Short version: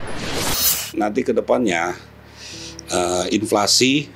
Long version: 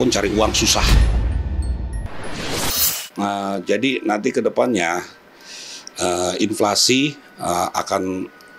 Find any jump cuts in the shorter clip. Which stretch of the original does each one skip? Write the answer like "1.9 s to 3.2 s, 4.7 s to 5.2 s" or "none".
3.1 s to 4.0 s